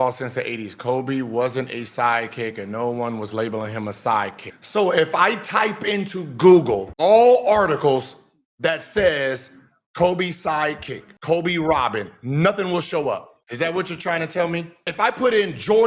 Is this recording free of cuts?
yes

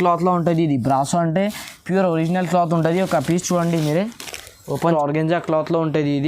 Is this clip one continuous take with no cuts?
no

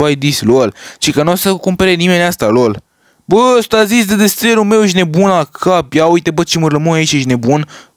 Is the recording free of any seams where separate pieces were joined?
yes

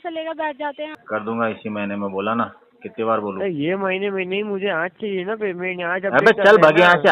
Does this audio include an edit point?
yes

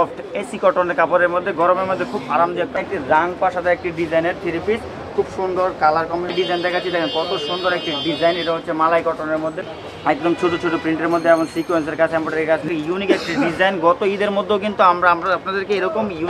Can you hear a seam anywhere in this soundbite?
yes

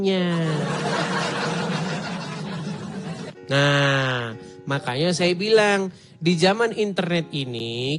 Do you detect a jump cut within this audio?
no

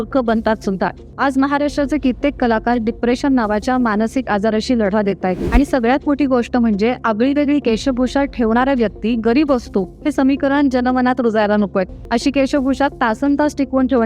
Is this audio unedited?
no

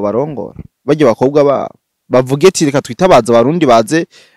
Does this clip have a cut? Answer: no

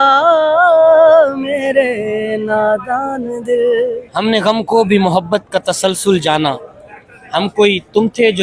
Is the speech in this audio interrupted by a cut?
yes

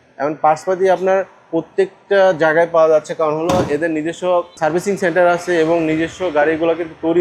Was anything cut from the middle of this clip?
no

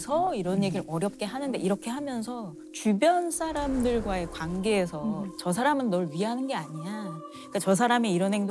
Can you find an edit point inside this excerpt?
no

